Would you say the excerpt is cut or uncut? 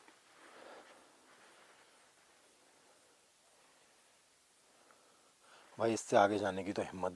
uncut